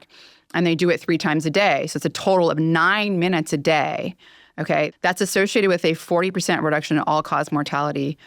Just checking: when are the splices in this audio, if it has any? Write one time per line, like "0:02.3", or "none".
0:04.9